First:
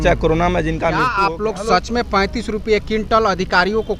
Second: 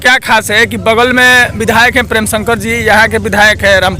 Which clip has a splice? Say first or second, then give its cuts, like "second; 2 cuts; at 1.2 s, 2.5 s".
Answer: first; 1 cut; at 1.1 s